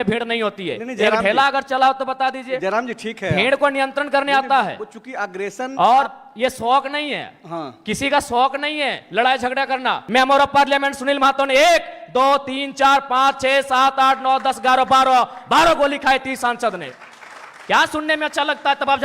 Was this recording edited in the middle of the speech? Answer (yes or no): yes